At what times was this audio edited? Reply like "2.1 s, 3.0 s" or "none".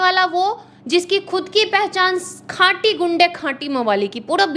none